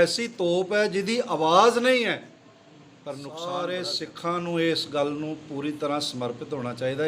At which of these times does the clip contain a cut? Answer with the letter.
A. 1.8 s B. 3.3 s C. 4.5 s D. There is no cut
B